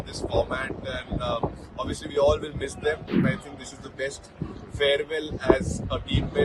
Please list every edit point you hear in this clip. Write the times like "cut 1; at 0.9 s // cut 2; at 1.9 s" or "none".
cut 1; at 3.2 s

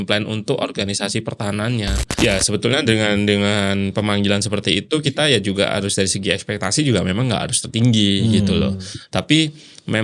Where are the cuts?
cut 1; at 2.0 s

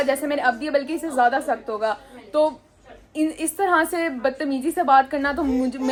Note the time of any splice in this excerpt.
none

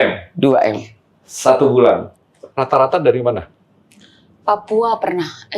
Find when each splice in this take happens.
cut 1; at 2.1 s

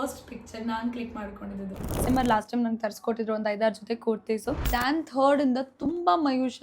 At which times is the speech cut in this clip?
cut 1; at 2.0 s // cut 2; at 4.7 s

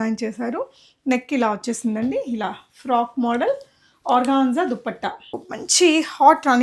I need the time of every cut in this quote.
cut 1; at 5.5 s

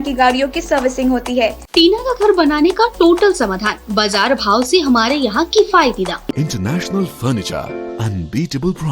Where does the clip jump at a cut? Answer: cut 1; at 1.6 s // cut 2; at 6.3 s

